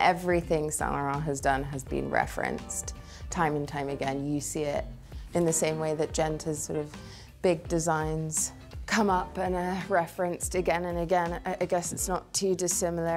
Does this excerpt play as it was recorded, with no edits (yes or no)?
yes